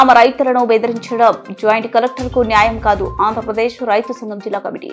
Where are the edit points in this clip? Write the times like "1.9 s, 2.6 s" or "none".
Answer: none